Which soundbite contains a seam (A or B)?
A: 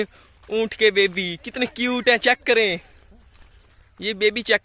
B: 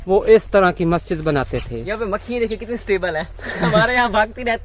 B